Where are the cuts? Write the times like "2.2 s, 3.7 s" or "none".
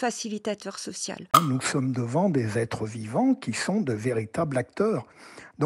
1.2 s